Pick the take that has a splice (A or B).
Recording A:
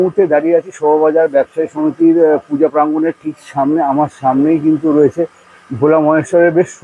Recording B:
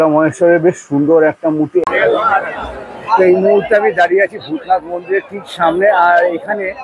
B